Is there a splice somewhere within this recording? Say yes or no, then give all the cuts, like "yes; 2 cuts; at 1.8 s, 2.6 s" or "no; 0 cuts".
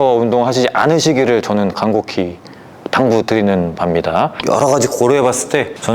yes; 1 cut; at 4.4 s